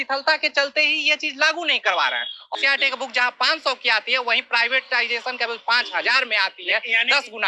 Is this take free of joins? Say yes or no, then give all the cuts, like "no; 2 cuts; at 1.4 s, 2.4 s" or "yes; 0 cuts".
no; 1 cut; at 2.5 s